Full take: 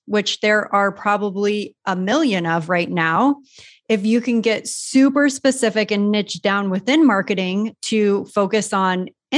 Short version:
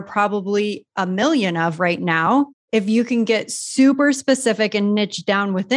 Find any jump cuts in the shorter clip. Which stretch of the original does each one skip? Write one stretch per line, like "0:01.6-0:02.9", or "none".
0:03.5-0:03.8